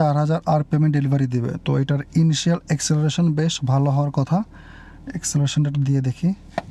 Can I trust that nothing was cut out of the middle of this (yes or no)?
yes